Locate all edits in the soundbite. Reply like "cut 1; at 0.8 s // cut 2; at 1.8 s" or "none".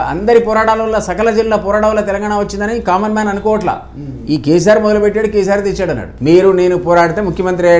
cut 1; at 6.1 s